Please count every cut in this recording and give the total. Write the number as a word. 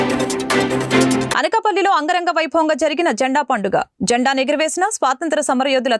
one